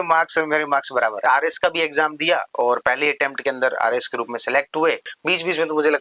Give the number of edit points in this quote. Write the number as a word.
two